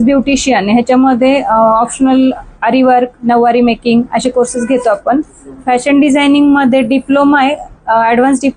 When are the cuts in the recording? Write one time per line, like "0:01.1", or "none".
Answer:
none